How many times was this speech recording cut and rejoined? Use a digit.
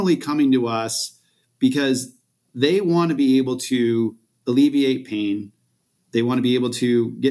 0